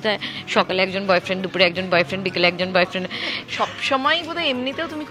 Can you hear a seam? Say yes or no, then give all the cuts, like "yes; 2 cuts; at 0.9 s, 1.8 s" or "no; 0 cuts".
yes; 1 cut; at 3.3 s